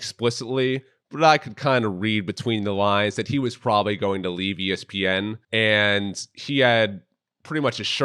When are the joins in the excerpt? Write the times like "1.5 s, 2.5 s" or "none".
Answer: 5.4 s

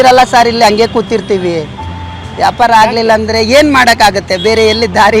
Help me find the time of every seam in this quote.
none

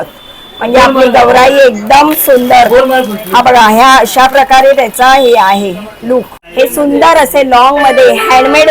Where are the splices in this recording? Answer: 6.4 s

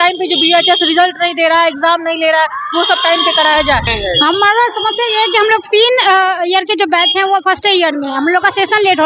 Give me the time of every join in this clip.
3.9 s

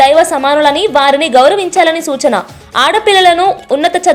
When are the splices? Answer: none

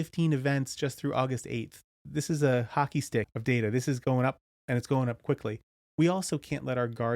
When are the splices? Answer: 2.0 s, 3.3 s, 6.0 s

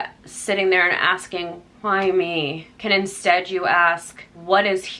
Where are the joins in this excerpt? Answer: none

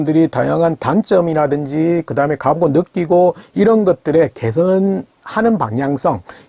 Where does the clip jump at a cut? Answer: none

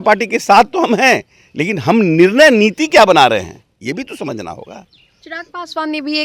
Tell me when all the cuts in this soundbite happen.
none

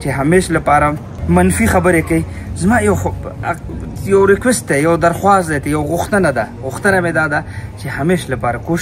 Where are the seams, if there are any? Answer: none

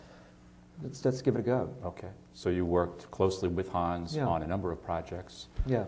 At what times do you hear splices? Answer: none

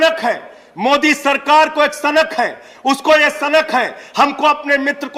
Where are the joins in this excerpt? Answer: none

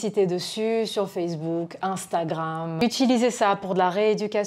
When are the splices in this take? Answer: 2.7 s

